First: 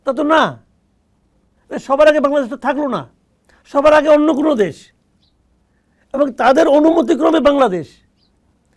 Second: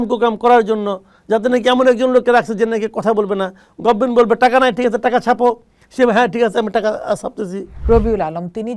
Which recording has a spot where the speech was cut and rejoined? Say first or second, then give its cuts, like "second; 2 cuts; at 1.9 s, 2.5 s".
second; 1 cut; at 7.7 s